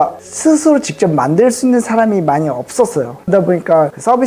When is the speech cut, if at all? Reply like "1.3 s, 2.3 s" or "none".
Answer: 3.3 s